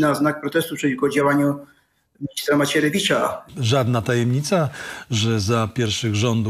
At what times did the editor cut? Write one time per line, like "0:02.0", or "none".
0:03.5